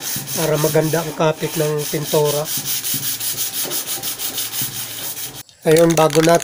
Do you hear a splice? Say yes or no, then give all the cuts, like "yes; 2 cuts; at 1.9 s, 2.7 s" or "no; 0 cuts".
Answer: yes; 1 cut; at 5.4 s